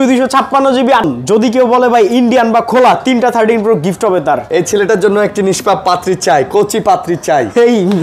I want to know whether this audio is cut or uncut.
cut